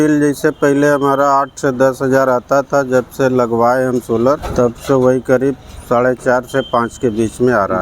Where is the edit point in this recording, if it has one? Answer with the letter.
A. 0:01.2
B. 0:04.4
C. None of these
B